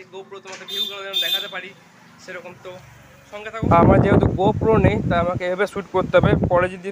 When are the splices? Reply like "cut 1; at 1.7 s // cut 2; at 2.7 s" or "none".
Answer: cut 1; at 3.5 s